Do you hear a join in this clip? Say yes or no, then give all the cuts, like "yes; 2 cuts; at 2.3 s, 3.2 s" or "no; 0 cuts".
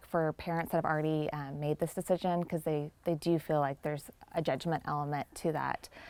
no; 0 cuts